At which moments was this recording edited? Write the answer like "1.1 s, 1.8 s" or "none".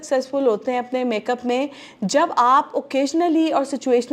none